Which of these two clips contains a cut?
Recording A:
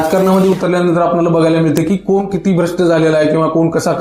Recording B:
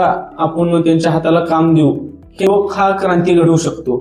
B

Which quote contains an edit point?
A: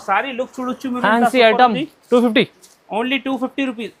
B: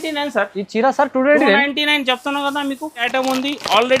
B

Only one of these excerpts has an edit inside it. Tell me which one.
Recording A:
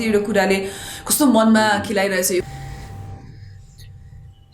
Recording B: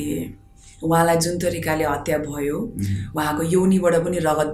A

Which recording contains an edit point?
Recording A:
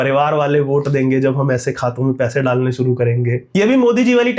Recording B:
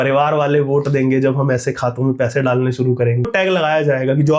B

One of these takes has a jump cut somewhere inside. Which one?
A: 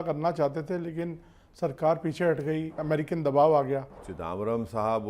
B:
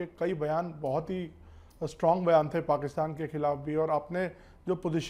A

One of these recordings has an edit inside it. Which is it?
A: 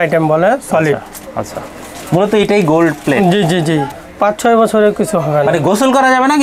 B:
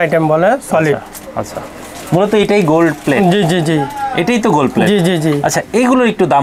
A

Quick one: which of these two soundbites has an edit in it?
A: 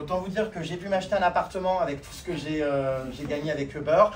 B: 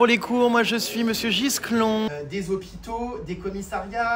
B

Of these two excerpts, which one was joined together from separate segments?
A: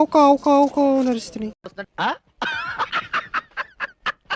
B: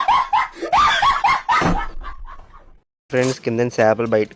B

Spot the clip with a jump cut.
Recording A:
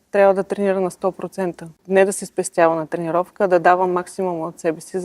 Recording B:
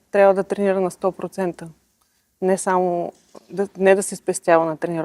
A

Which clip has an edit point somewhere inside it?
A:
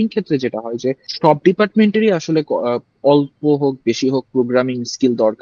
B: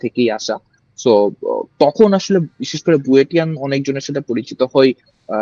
A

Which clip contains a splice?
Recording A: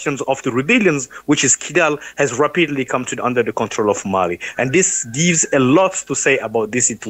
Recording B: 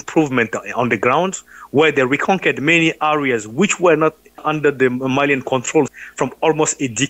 B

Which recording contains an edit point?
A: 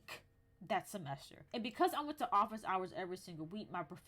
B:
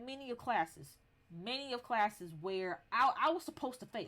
A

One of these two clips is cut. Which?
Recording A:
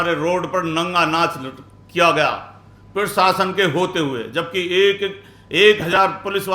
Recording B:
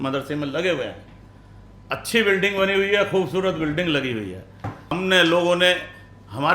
B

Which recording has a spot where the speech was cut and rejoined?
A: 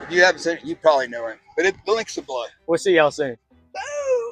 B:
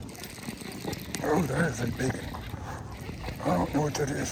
A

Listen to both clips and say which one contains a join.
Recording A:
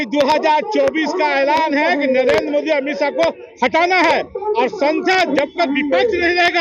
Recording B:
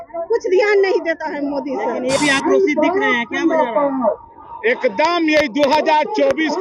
B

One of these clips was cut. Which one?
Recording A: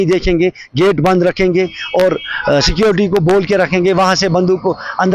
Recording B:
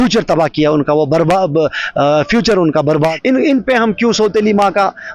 B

